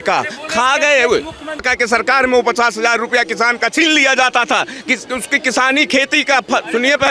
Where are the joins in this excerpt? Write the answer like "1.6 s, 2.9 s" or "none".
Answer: 1.7 s